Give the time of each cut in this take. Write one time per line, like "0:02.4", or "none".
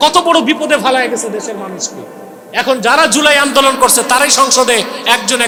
none